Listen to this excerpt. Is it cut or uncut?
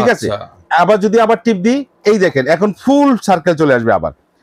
uncut